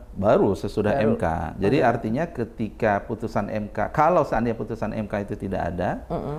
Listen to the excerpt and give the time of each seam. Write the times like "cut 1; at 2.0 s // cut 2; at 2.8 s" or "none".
none